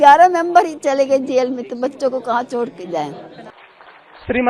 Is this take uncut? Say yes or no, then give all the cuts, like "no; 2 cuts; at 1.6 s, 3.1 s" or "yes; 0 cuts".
no; 1 cut; at 3.4 s